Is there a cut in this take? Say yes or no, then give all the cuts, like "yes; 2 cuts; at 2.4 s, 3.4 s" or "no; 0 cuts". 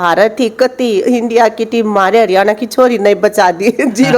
no; 0 cuts